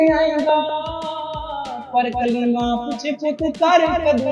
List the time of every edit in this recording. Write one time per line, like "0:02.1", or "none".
none